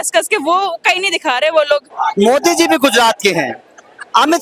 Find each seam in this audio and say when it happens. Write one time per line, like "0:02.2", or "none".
0:01.9